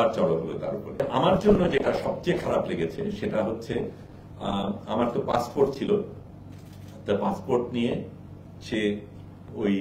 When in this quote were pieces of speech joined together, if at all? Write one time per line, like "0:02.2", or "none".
0:01.0